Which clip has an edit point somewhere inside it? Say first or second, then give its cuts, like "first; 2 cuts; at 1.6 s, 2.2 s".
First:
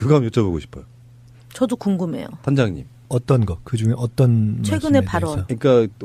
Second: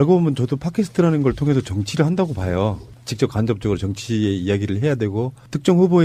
first; 1 cut; at 4.8 s